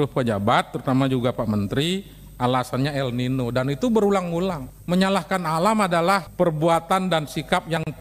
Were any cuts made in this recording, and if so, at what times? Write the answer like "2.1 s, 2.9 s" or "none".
4.7 s